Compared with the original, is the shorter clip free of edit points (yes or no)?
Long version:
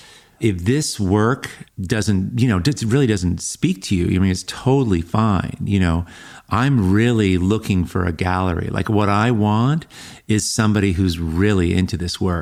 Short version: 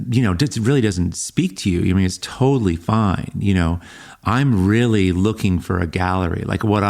yes